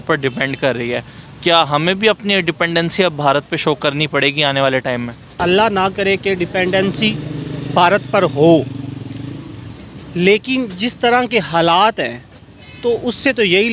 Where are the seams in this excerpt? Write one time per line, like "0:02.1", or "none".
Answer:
0:05.4